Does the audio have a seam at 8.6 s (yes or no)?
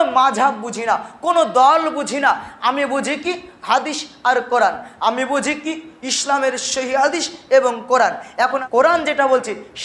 yes